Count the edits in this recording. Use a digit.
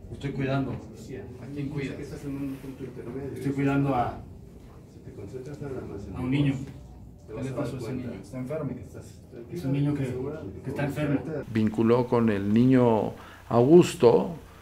1